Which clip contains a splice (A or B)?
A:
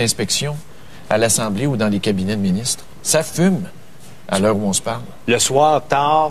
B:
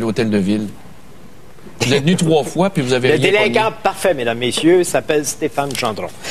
B